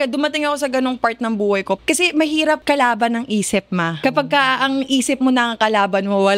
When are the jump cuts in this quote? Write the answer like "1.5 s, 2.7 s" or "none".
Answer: 1.8 s, 2.6 s, 4.0 s